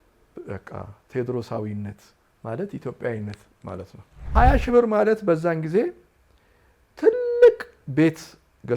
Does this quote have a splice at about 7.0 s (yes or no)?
no